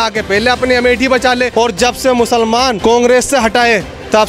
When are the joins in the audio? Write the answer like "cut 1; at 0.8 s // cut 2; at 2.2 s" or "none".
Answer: cut 1; at 1.5 s // cut 2; at 2.8 s